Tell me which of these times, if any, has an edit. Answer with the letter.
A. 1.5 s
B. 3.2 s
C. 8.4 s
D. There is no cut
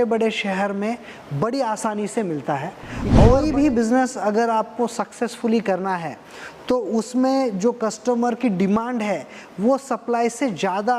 B